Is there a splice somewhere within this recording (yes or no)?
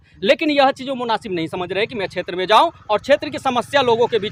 no